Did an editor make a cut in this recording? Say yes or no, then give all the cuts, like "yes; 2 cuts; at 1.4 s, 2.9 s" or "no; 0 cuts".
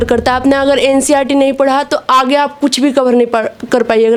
no; 0 cuts